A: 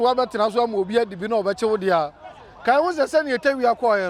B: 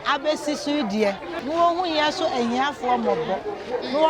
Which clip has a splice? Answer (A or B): B